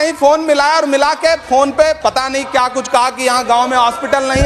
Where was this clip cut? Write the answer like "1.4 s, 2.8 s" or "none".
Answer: 2.2 s